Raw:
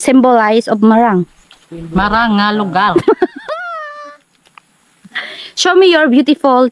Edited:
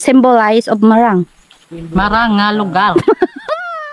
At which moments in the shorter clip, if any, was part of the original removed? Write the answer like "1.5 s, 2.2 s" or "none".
none